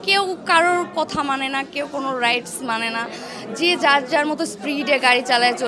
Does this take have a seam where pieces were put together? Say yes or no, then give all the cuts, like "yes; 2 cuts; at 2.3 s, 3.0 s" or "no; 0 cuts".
no; 0 cuts